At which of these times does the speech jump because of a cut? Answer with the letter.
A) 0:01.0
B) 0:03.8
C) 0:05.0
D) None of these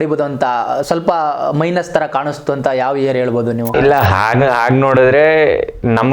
B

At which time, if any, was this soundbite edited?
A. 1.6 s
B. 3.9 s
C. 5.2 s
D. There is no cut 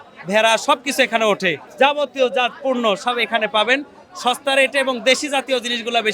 A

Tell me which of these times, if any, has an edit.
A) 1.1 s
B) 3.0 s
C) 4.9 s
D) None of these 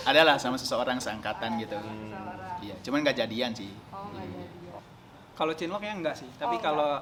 D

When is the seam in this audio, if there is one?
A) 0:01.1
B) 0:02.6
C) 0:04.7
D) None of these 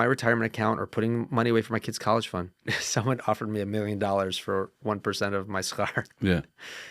B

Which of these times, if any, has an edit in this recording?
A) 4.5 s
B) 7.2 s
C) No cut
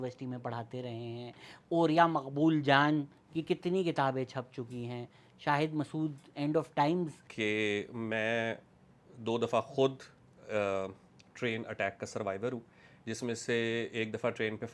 B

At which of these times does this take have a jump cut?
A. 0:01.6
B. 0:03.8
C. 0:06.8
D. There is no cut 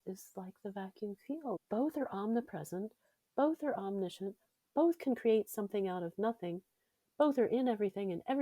A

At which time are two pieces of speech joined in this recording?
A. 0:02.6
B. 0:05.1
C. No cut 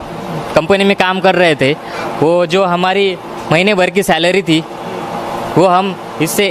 C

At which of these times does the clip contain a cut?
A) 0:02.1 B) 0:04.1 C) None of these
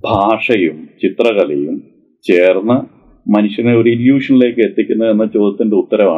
C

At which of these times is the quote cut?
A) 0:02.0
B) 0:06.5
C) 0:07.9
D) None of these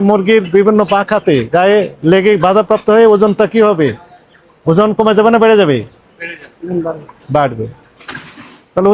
D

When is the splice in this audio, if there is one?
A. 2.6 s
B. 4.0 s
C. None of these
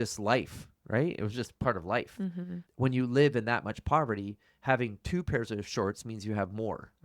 A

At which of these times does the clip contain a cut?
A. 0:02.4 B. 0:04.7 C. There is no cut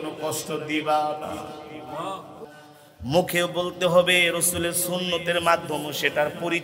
A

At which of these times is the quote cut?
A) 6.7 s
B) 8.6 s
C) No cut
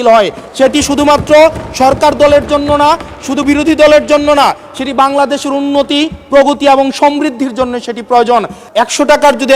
B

